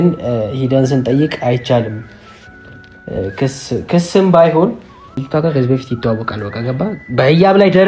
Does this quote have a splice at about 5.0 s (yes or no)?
yes